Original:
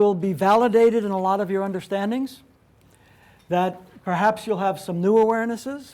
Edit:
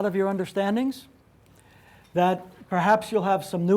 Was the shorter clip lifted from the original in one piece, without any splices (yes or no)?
yes